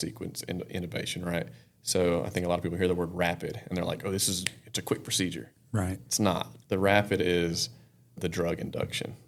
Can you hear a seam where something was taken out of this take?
no; 0 cuts

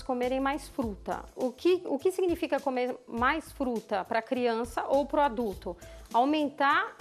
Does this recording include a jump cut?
no; 0 cuts

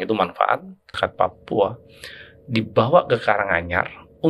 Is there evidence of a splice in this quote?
yes; 1 cut; at 0.9 s

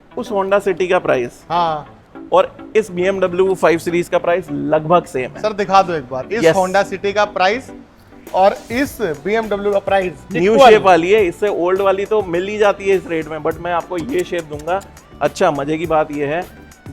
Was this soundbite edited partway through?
no; 0 cuts

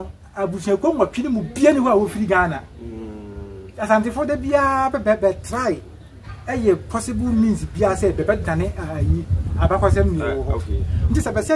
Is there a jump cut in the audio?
no; 0 cuts

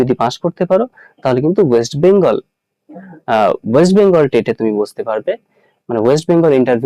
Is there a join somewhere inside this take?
no; 0 cuts

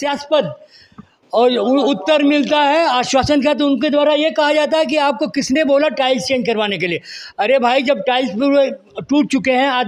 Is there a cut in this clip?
no; 0 cuts

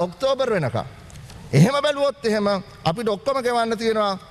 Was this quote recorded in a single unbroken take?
yes; 0 cuts

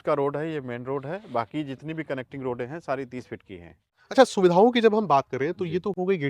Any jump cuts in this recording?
yes; 1 cut; at 4.0 s

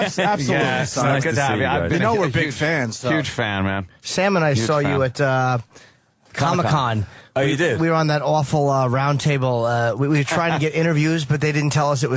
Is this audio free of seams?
yes; 0 cuts

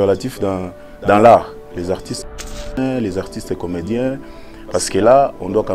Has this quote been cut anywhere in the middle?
no; 0 cuts

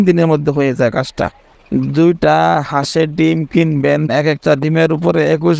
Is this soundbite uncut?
no; 2 cuts; at 1.5 s, 4.1 s

